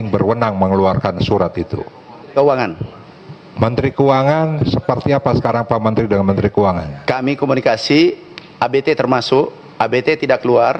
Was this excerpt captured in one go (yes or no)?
yes